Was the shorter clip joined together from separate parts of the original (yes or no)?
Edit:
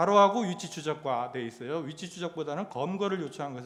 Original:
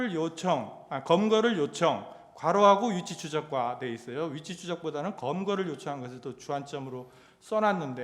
no